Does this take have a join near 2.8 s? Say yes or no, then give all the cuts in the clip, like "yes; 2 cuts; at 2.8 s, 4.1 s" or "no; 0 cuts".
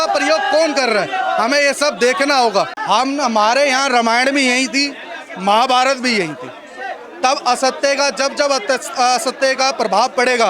yes; 1 cut; at 2.8 s